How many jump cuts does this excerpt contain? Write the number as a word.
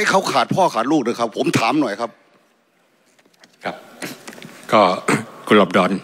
zero